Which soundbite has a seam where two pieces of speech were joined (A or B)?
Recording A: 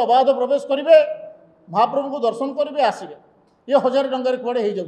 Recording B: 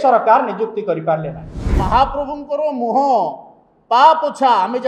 B